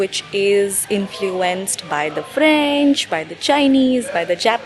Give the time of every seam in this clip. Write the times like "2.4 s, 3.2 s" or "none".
none